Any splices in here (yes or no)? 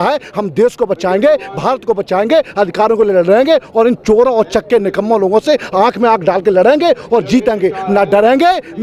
no